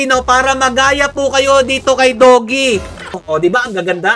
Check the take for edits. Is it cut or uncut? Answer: cut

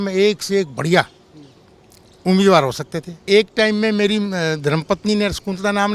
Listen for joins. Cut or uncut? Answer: cut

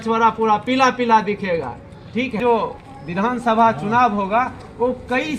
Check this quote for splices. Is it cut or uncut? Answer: cut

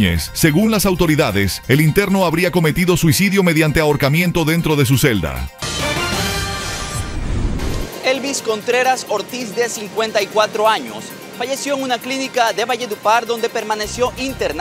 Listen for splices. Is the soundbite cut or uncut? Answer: cut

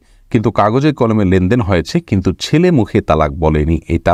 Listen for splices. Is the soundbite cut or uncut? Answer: uncut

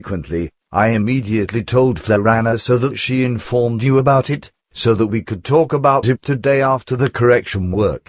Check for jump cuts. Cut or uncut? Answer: cut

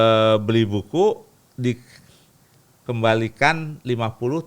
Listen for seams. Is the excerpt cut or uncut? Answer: uncut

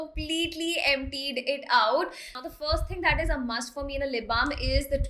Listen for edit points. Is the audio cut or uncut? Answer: uncut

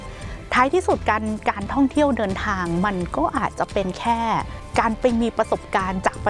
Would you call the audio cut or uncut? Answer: cut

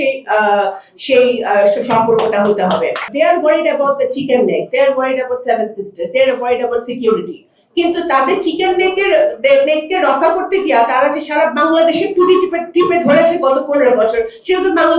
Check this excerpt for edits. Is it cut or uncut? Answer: cut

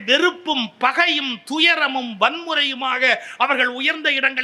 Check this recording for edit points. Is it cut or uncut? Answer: uncut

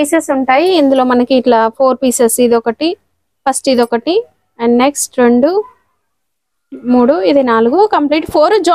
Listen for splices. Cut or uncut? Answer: uncut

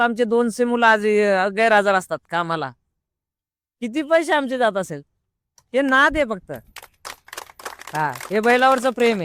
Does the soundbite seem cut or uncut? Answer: uncut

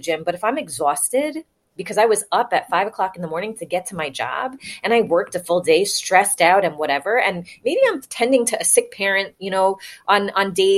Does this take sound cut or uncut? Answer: uncut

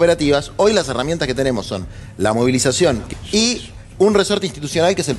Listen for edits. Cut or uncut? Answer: cut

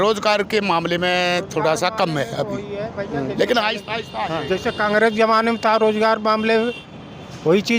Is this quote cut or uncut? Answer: cut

